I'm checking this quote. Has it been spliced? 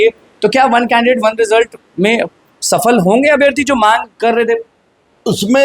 no; 0 cuts

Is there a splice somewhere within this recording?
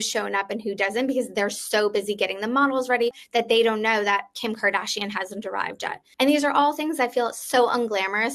yes; 2 cuts; at 3.2 s, 6.0 s

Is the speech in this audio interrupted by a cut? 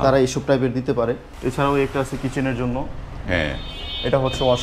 yes; 1 cut; at 1.3 s

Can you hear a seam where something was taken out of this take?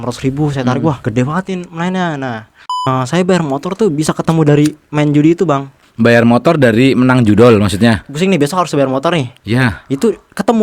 yes; 4 cuts; at 1.0 s, 2.9 s, 5.8 s, 8.0 s

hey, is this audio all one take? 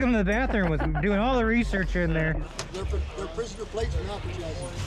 no; 1 cut; at 2.4 s

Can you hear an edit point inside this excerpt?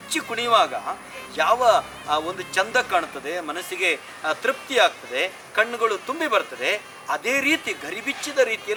no; 0 cuts

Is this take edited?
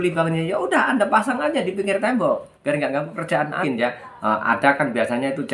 yes; 1 cut; at 3.6 s

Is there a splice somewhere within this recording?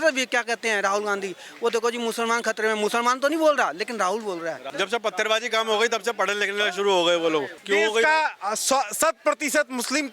yes; 2 cuts; at 4.7 s, 7.6 s

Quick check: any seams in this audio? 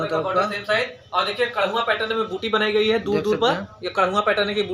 no; 0 cuts

